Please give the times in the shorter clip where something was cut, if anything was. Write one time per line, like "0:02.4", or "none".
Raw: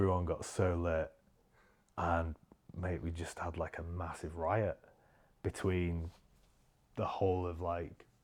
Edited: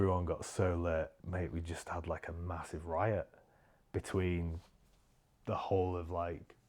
0:01.2